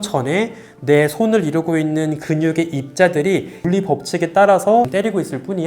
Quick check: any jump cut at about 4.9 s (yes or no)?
yes